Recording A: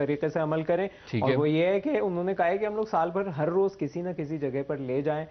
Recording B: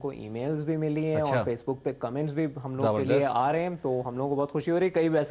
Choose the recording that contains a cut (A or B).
A